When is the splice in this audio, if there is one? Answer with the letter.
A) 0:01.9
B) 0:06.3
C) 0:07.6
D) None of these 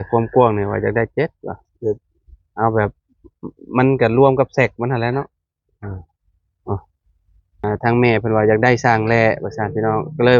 C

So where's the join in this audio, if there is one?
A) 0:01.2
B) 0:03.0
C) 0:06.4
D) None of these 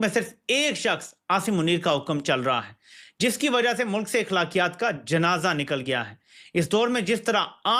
D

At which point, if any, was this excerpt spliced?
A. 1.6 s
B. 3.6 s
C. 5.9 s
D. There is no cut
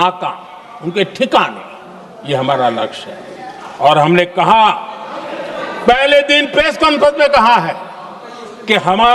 D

